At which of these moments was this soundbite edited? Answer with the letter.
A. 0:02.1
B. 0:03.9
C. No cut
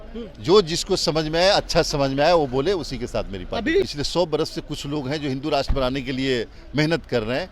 B